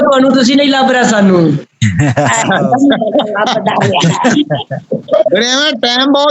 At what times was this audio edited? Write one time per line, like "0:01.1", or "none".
none